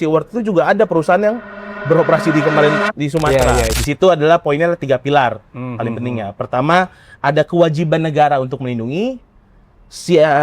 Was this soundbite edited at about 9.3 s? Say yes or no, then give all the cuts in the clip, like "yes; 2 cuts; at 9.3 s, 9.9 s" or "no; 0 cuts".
no; 1 cut; at 3.8 s